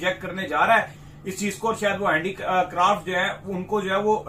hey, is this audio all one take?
yes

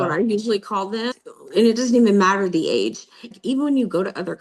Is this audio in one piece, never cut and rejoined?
no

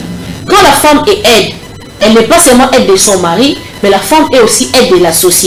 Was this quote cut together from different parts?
no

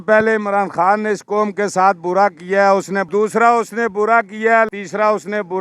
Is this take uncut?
no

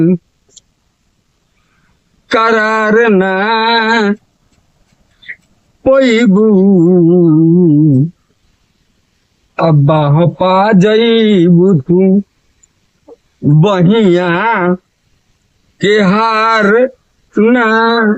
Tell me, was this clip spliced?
no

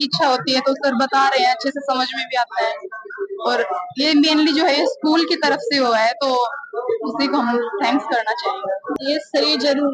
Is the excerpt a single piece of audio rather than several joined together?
no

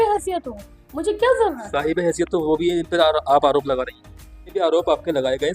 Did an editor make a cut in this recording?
yes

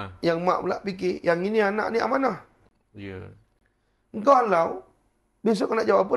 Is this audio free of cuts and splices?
yes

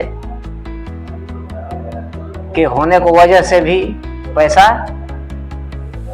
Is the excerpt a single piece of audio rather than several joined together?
no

